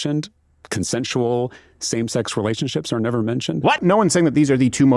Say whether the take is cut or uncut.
cut